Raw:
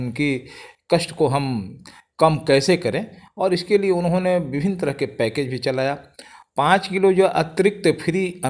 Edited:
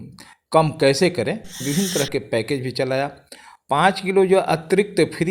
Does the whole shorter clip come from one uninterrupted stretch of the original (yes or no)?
no